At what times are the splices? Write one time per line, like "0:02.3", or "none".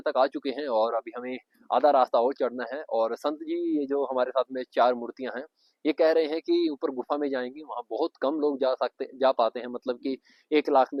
none